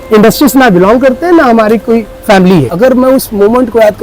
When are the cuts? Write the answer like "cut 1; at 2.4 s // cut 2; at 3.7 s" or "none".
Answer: cut 1; at 2.7 s